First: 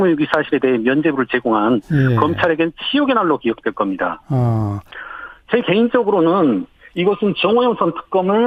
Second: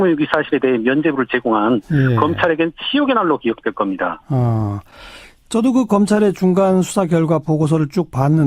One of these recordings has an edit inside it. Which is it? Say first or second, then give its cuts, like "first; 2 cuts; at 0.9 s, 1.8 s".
second; 1 cut; at 4.8 s